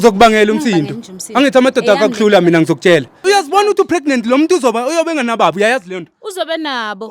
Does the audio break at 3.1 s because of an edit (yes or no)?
yes